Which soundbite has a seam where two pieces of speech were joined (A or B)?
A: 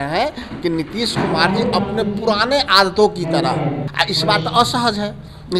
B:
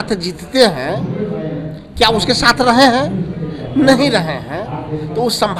A